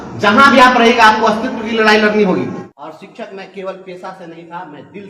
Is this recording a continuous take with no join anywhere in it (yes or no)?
no